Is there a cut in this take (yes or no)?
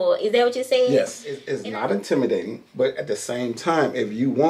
yes